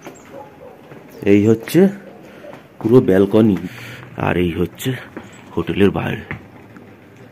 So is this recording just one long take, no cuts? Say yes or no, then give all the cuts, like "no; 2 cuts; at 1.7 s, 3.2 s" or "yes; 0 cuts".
no; 1 cut; at 3.6 s